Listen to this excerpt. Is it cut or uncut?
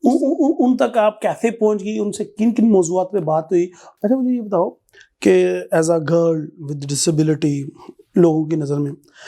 cut